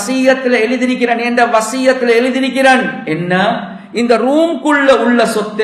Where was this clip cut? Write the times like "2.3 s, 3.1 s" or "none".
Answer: none